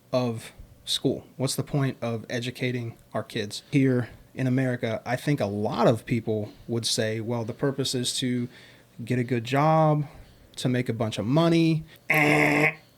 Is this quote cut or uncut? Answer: cut